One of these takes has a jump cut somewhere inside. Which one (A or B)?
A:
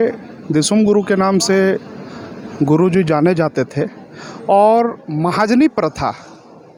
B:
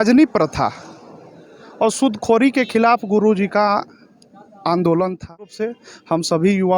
B